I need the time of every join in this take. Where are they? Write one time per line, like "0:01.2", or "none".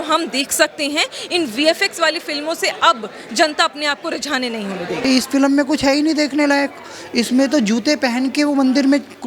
0:05.0